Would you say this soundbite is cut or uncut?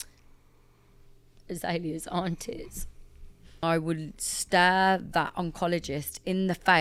cut